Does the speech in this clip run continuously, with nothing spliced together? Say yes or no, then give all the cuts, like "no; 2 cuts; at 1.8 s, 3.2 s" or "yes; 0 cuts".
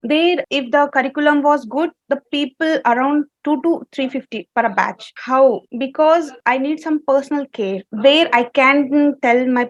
yes; 0 cuts